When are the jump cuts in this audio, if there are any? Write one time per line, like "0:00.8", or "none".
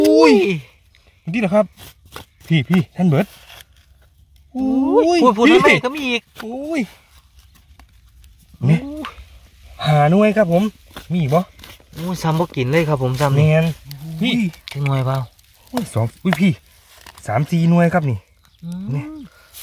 0:14.3